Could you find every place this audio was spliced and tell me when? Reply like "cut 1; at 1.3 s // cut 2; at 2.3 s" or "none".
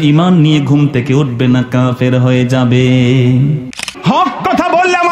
cut 1; at 3.8 s